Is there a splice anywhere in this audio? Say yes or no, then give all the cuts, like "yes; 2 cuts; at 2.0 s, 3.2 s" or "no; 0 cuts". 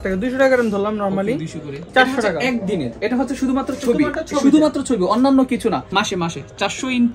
yes; 2 cuts; at 1.7 s, 5.9 s